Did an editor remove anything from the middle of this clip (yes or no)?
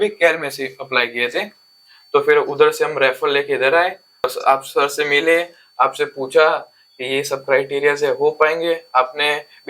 yes